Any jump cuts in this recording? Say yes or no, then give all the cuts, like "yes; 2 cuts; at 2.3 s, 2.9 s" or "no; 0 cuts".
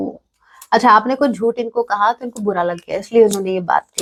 no; 0 cuts